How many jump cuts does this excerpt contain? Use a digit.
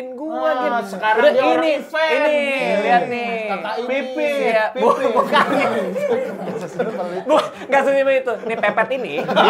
0